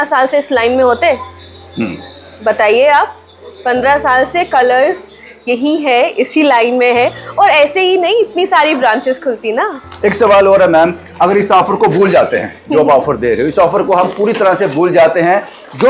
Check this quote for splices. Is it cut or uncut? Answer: uncut